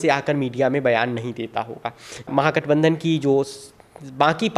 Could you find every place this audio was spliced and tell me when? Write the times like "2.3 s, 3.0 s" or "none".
2.3 s